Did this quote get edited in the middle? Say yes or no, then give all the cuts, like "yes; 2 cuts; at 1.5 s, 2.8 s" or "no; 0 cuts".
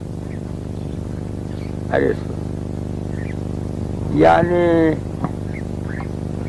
no; 0 cuts